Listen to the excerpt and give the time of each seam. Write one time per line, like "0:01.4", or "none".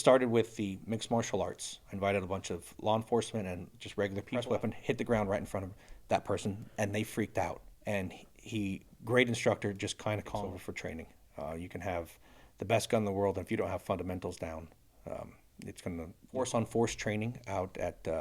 0:04.4
0:10.4
0:16.2

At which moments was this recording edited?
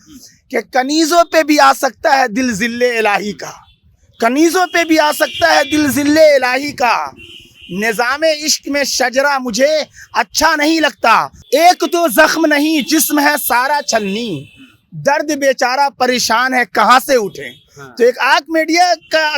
0:11.4

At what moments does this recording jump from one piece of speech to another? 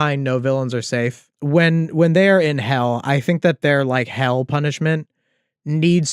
0:01.3

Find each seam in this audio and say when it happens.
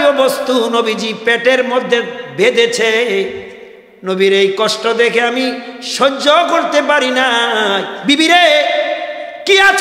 0:07.9

